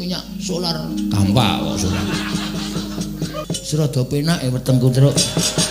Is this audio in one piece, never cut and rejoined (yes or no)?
no